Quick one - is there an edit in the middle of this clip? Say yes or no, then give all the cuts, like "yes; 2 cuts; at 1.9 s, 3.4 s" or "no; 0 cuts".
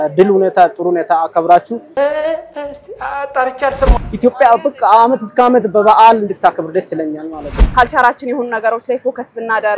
yes; 2 cuts; at 4.0 s, 7.5 s